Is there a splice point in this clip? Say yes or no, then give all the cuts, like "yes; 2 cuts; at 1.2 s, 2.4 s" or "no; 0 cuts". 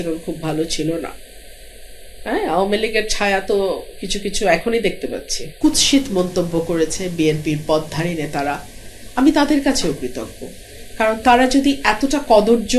yes; 1 cut; at 5.5 s